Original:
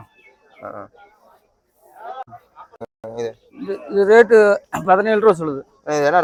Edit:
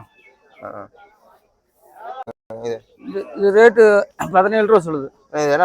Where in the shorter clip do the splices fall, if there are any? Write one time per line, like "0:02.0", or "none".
0:02.3